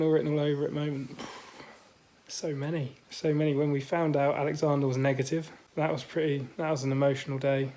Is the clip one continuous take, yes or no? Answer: no